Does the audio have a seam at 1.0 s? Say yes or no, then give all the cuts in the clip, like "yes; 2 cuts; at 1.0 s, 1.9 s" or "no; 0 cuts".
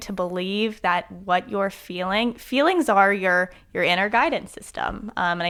no; 0 cuts